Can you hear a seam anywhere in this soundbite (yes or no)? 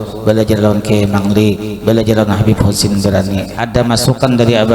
yes